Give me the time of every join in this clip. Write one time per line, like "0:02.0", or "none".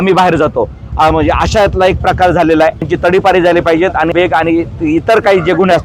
0:02.9
0:04.1